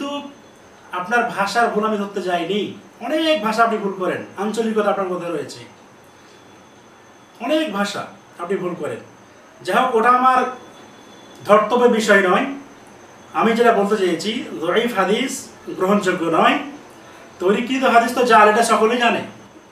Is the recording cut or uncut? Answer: uncut